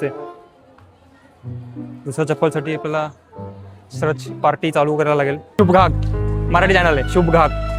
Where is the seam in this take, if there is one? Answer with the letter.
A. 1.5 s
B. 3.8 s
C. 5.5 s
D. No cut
C